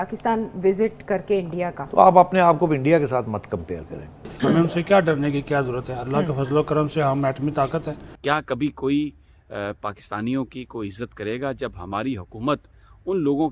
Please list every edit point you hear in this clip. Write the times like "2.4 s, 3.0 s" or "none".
1.8 s, 4.3 s, 7.9 s